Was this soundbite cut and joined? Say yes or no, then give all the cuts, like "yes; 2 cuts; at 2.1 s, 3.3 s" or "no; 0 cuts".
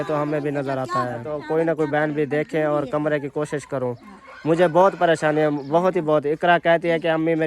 yes; 1 cut; at 1.3 s